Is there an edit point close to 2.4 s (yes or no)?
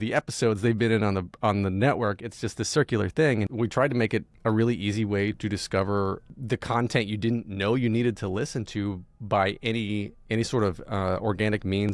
no